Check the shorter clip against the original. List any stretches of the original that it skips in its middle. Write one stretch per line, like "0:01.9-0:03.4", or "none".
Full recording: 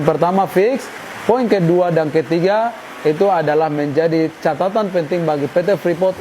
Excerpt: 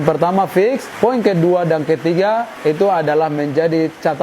0:00.9-0:01.1
0:02.8-0:02.9